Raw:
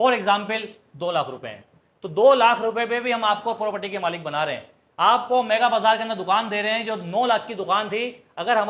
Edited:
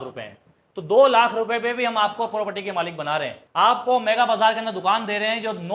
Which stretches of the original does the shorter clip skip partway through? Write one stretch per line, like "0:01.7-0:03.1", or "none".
0:04.7-0:04.8